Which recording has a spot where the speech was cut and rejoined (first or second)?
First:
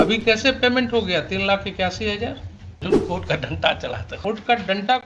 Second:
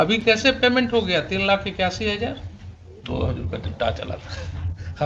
first